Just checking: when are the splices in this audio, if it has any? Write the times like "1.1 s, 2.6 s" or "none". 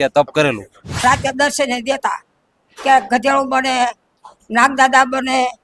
0.9 s